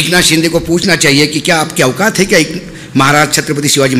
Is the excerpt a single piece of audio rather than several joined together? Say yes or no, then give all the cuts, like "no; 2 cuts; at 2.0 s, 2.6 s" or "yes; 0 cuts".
yes; 0 cuts